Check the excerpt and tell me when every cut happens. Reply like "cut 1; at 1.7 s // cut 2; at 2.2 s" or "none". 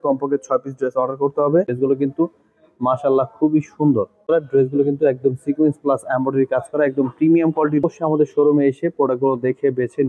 cut 1; at 1.7 s // cut 2; at 4.2 s // cut 3; at 7.8 s